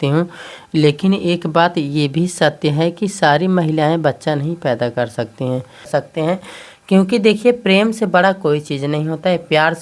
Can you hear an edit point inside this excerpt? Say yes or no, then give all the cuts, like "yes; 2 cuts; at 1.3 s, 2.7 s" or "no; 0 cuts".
yes; 1 cut; at 5.9 s